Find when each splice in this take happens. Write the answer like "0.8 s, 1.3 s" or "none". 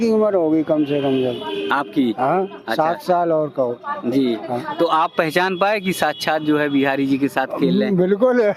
none